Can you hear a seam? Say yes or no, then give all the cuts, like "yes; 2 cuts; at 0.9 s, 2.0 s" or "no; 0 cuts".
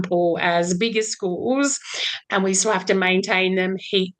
no; 0 cuts